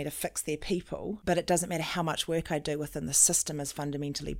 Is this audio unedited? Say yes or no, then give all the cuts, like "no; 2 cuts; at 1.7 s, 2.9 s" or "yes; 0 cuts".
no; 1 cut; at 1.2 s